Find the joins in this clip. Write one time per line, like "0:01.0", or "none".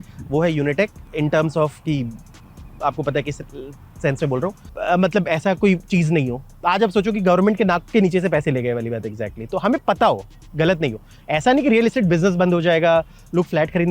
0:01.0
0:04.7